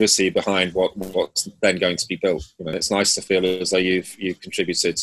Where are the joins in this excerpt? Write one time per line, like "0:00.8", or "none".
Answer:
0:02.8